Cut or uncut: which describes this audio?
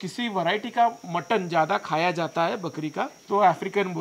uncut